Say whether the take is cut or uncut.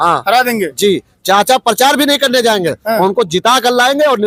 uncut